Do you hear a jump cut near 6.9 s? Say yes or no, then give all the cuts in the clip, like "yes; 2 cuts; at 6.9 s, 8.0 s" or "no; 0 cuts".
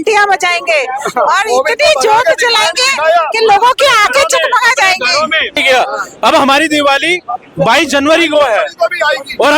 no; 1 cut; at 5.6 s